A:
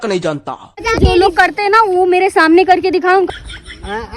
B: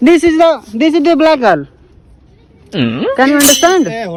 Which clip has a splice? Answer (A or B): A